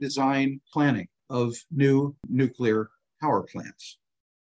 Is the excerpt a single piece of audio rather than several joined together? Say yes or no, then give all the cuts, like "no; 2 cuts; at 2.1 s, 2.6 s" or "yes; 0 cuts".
no; 2 cuts; at 0.9 s, 2.2 s